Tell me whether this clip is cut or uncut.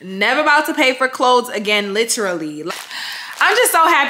cut